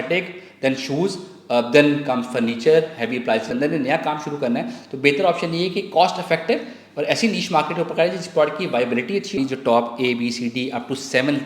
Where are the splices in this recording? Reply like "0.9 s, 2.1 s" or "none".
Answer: 3.5 s, 9.3 s